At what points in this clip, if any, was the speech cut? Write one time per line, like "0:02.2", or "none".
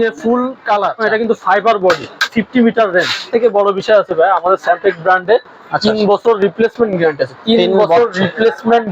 0:01.0
0:02.3
0:03.2